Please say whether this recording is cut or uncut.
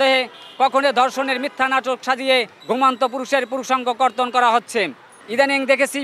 uncut